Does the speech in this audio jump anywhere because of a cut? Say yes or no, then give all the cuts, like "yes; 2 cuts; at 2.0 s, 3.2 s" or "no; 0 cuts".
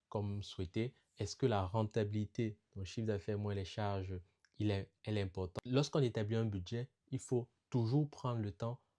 yes; 1 cut; at 5.5 s